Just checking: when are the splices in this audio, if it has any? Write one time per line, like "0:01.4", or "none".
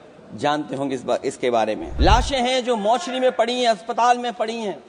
0:01.9